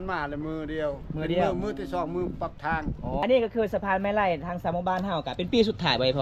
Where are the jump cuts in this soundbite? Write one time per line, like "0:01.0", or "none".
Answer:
0:03.2